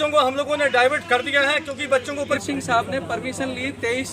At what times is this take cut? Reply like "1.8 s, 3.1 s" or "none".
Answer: 2.4 s